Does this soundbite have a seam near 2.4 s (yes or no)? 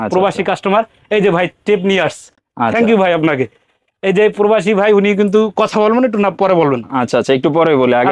no